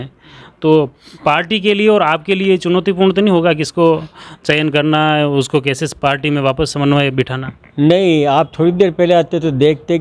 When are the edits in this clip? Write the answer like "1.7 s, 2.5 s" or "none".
none